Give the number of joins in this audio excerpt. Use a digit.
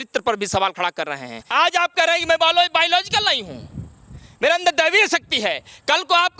1